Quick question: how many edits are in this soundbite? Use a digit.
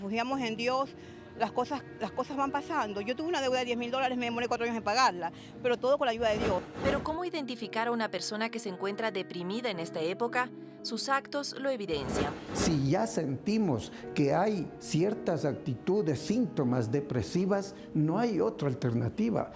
2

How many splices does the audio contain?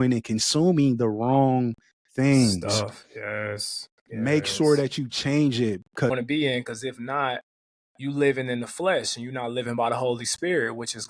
1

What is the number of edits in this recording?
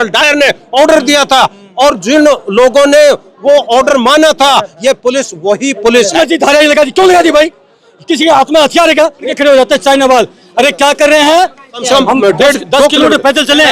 3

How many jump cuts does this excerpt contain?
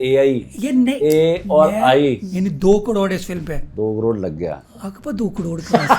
2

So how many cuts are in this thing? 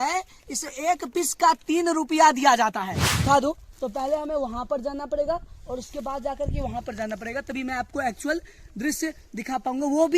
1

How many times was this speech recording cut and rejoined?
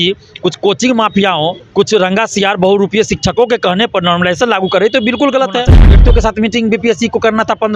2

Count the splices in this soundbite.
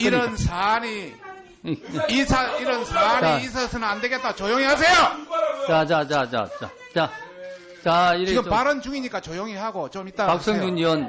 1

